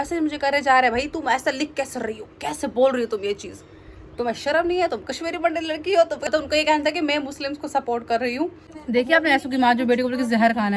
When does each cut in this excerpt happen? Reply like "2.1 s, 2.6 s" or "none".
6.2 s, 8.7 s